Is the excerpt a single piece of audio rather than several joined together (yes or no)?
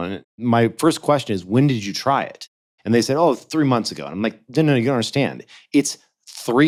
yes